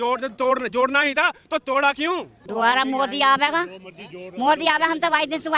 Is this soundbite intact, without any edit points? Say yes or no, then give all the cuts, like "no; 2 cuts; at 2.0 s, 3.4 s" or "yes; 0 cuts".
no; 1 cut; at 2.4 s